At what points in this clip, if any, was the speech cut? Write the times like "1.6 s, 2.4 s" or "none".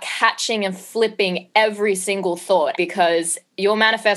2.8 s